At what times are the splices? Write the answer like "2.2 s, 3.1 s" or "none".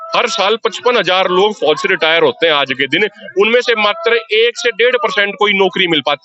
none